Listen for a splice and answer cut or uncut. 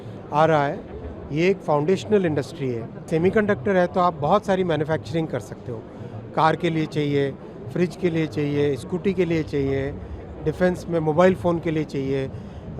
cut